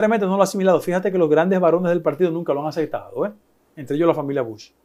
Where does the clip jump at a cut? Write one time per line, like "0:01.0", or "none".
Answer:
none